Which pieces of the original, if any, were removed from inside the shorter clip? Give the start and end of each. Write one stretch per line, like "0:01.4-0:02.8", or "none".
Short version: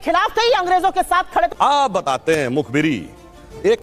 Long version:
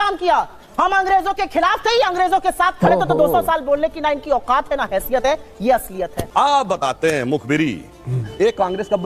0:02.9-0:06.2